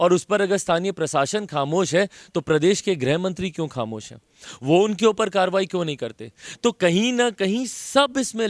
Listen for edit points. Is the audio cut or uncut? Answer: uncut